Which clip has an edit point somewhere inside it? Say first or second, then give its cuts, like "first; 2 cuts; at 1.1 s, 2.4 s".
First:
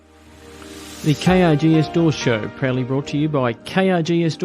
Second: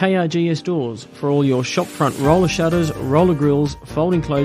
first; 1 cut; at 1.0 s